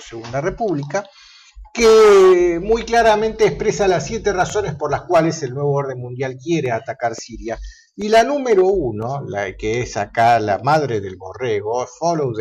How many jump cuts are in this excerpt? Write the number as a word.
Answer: one